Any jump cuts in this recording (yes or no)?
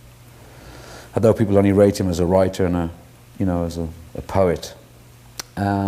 yes